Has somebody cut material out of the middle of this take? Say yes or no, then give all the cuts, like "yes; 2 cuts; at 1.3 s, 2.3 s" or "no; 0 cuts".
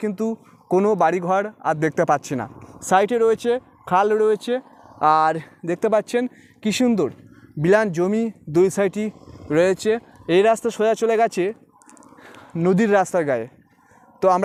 no; 0 cuts